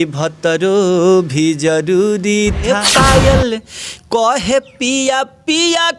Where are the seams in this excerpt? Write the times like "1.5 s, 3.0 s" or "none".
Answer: 2.6 s